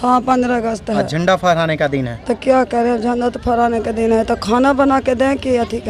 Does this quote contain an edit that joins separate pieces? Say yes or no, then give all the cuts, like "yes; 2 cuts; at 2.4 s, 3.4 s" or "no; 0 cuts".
no; 0 cuts